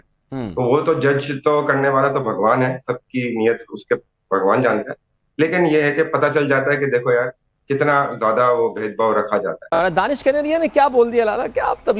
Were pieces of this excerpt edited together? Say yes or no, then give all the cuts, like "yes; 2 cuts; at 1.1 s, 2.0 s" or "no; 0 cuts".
yes; 1 cut; at 9.8 s